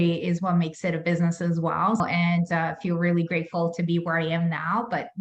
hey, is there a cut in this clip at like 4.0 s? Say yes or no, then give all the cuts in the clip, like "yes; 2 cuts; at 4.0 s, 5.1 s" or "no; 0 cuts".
no; 1 cut; at 2.0 s